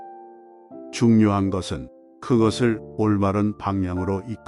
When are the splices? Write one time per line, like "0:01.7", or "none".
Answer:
0:01.0